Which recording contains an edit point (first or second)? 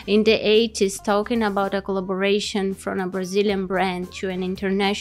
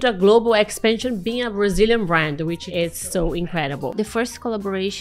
second